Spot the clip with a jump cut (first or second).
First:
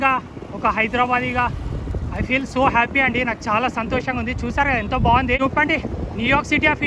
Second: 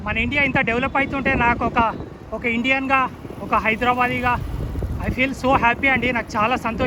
first